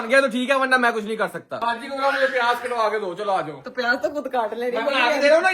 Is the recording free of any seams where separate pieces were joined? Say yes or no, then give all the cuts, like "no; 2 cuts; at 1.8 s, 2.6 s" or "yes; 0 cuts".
yes; 0 cuts